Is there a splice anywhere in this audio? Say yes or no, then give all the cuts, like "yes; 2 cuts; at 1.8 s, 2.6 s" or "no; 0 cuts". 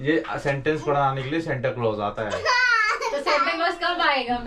no; 0 cuts